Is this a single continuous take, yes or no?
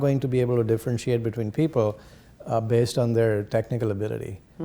yes